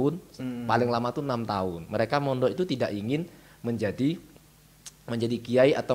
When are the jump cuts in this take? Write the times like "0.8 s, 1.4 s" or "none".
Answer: none